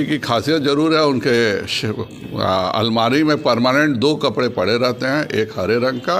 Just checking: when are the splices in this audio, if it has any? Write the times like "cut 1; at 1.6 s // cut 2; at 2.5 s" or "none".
none

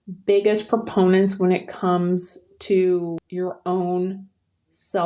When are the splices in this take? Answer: cut 1; at 3.2 s

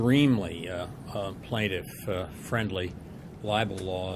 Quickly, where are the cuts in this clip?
none

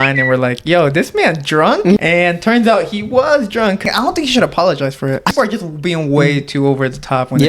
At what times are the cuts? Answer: cut 1; at 2.0 s // cut 2; at 3.8 s // cut 3; at 5.3 s

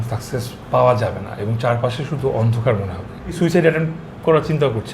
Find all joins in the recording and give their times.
cut 1; at 3.4 s

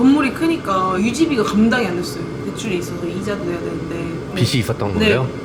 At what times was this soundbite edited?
none

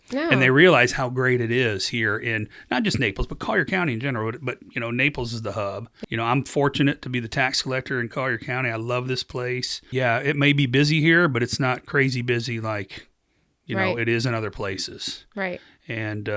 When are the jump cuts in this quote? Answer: cut 1; at 5.9 s // cut 2; at 9.8 s

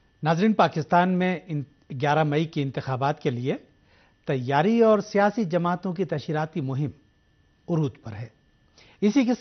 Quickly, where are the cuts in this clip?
cut 1; at 6.1 s

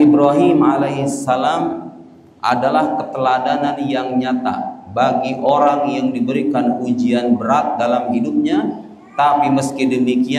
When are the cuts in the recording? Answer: none

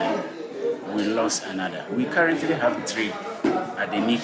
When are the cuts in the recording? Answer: cut 1; at 1.8 s

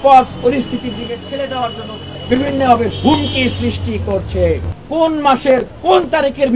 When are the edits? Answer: cut 1; at 2.1 s // cut 2; at 4.8 s

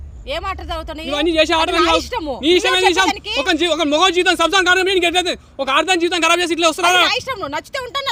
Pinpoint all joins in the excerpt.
none

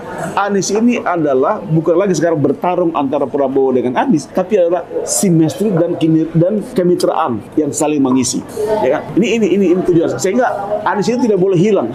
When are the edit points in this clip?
cut 1; at 4.3 s // cut 2; at 6.7 s // cut 3; at 7.4 s // cut 4; at 8.8 s

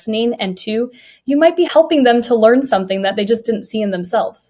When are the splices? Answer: cut 1; at 1.7 s

